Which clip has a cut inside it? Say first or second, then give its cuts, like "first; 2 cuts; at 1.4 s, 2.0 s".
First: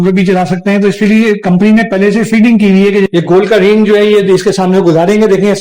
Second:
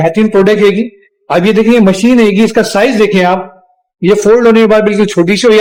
first; 1 cut; at 3.1 s